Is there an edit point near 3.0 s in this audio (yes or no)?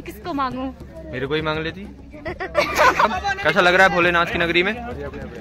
yes